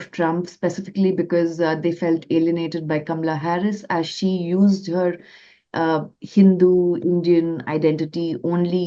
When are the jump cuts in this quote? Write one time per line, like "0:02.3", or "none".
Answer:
none